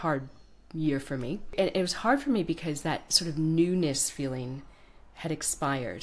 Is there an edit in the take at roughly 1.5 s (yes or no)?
yes